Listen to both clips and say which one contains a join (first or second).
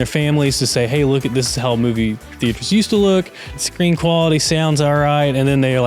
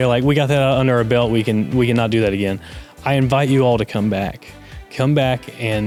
first